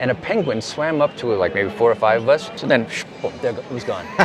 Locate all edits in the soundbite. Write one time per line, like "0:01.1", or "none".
0:02.6

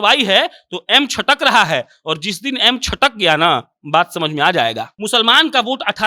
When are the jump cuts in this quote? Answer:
0:04.9

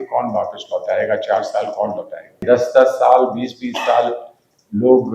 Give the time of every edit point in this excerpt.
0:02.4

